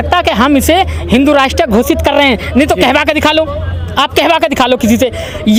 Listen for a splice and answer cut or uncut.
uncut